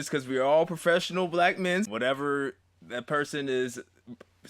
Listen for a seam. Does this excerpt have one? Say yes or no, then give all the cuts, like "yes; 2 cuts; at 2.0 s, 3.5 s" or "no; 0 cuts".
yes; 1 cut; at 1.9 s